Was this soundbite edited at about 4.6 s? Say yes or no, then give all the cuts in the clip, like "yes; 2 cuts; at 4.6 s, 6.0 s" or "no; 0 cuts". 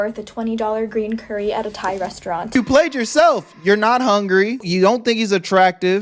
yes; 2 cuts; at 2.5 s, 4.6 s